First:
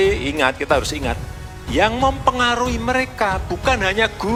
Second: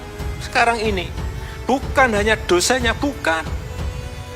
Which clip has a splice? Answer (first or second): second